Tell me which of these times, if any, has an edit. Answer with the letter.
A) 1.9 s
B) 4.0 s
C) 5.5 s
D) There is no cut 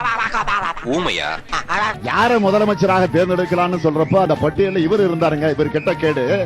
A